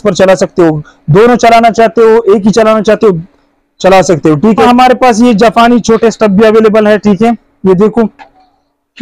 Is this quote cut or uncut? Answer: cut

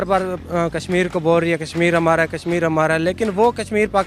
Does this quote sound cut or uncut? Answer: uncut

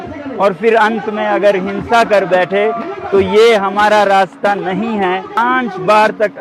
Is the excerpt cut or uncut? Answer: cut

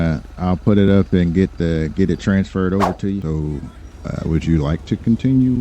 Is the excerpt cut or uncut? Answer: cut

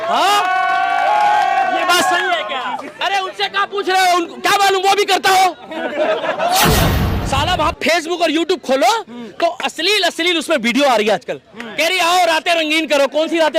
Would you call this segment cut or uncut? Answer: cut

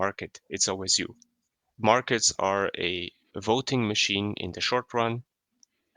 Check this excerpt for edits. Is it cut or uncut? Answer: cut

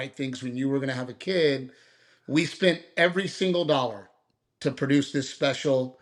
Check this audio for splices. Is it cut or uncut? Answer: uncut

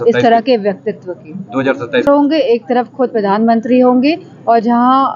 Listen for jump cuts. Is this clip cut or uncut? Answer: cut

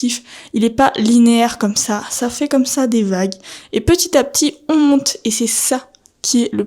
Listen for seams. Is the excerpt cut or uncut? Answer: uncut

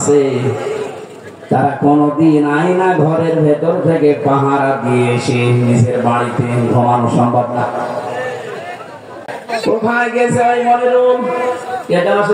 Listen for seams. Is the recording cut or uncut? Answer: cut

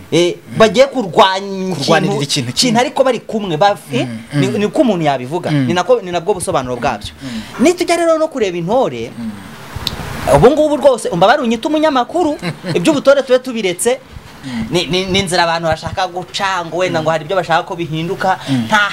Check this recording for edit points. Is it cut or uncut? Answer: cut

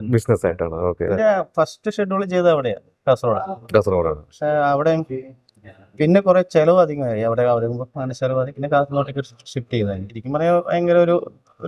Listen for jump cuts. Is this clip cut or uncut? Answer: cut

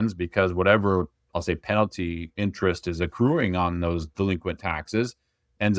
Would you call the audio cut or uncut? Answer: uncut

